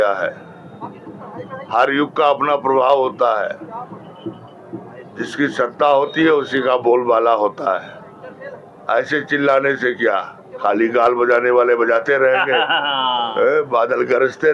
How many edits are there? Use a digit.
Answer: 0